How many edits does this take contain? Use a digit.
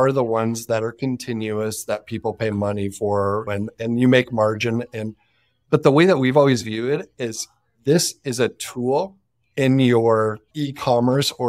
0